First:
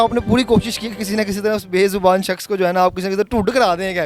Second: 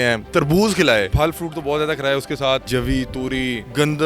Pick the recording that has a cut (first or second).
second